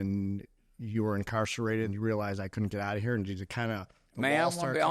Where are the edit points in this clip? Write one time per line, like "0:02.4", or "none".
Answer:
0:01.9